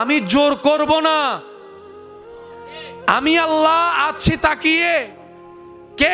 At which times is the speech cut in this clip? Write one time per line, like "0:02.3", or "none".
none